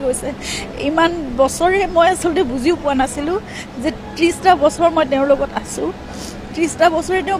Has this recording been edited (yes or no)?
no